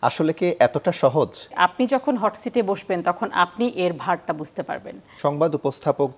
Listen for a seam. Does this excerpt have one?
yes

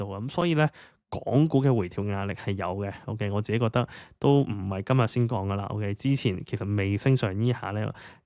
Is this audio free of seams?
yes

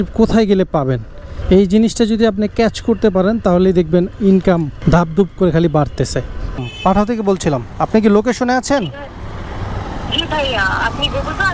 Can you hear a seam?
yes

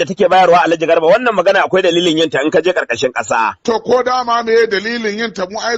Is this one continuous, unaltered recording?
no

